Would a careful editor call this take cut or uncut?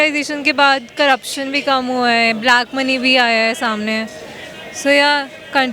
uncut